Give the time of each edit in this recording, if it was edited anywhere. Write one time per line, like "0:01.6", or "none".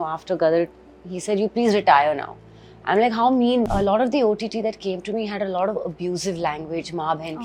0:03.6